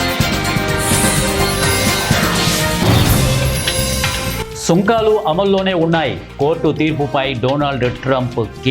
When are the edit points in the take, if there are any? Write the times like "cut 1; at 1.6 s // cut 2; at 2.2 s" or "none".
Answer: cut 1; at 4.4 s